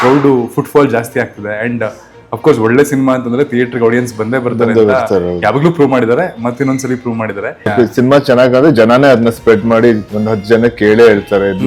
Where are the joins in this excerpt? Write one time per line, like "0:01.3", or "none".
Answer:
0:07.6